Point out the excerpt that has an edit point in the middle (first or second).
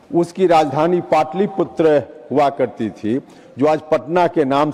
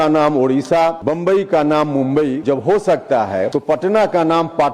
second